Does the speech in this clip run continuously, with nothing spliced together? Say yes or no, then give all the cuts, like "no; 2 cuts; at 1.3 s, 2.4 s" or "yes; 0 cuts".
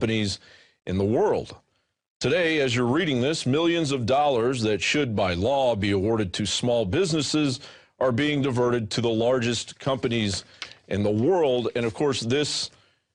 yes; 0 cuts